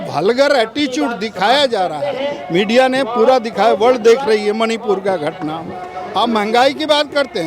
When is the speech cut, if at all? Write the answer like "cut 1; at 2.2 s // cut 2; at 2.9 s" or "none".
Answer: cut 1; at 5.9 s